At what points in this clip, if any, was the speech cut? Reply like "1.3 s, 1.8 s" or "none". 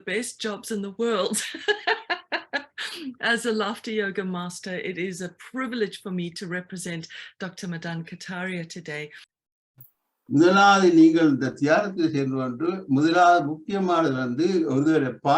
9.3 s